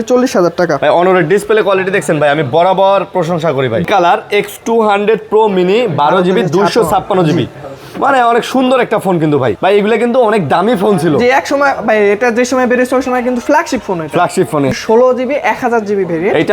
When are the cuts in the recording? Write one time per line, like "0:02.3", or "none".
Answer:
0:03.9
0:09.6
0:14.7